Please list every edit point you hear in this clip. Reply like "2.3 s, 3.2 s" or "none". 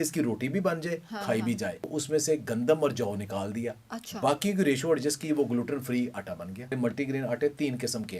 1.9 s, 6.7 s